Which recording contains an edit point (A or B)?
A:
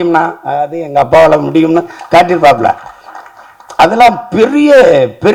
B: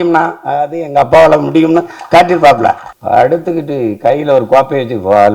B